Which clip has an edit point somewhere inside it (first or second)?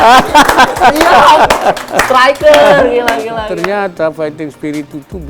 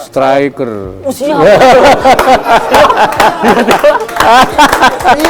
first